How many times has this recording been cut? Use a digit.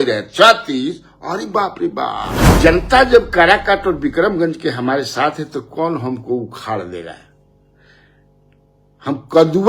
1